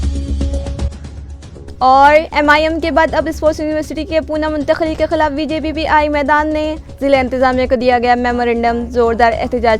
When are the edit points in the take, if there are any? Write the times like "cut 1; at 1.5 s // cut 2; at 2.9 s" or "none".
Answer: cut 1; at 1.1 s